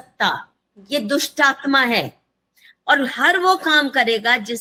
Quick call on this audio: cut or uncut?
uncut